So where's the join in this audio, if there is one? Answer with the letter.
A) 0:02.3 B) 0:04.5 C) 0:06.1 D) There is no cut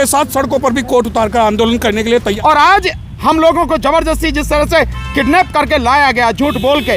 A